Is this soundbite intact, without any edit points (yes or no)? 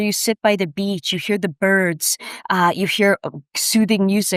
yes